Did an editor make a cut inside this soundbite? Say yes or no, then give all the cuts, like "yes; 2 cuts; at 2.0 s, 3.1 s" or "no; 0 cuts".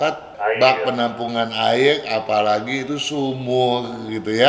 no; 0 cuts